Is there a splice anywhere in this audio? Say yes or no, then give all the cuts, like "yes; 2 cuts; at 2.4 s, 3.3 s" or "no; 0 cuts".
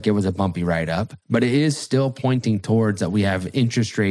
yes; 1 cut; at 1.2 s